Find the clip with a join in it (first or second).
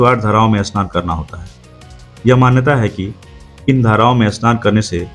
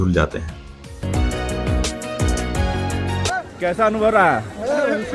second